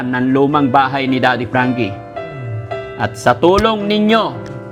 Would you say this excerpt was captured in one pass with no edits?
yes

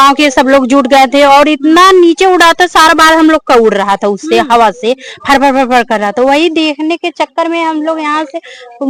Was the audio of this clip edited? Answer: no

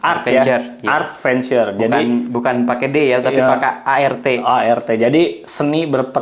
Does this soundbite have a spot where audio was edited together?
no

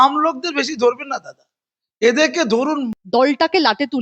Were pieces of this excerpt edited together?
yes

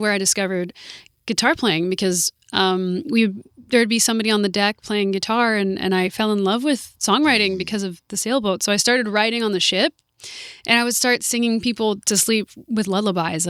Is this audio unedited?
yes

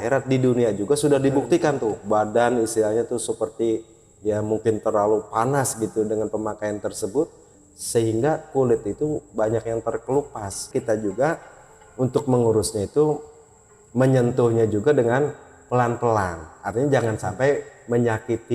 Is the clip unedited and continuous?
no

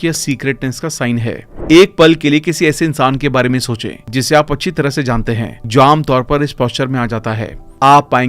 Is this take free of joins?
no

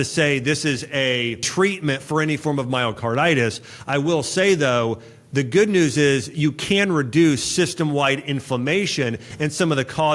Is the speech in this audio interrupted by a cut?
yes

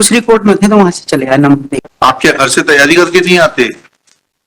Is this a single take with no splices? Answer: no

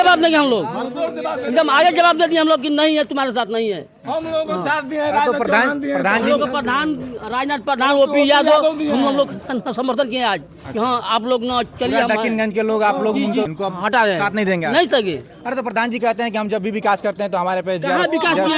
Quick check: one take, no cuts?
yes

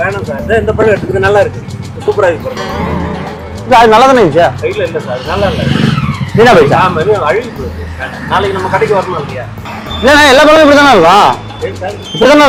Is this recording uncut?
yes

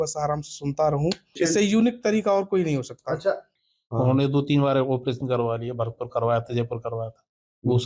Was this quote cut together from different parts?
yes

